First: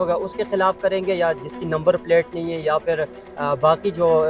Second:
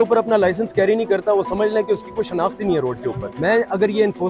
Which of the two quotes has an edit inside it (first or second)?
second